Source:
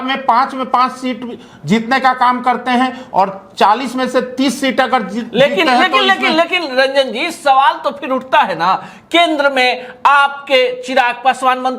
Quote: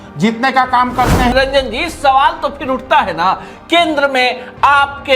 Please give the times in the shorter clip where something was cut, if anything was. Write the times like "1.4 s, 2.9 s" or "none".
1.3 s